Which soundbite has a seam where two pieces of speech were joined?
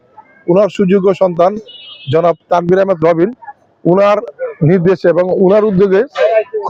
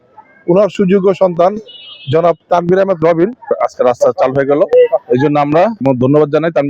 second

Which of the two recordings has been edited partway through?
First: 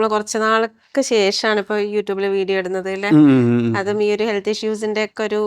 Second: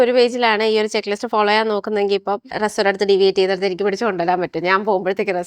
second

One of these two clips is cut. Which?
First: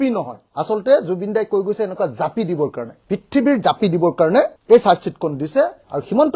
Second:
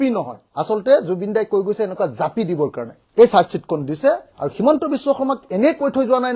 second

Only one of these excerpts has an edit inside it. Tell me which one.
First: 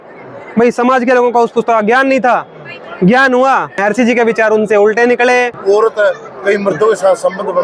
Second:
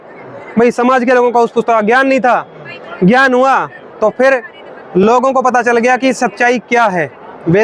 first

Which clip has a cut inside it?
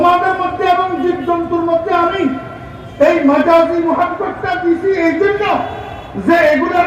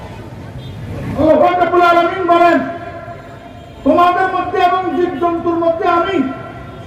second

